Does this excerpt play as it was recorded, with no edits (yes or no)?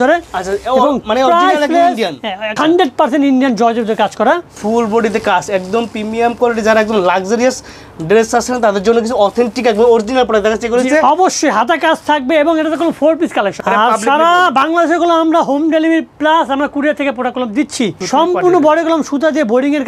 no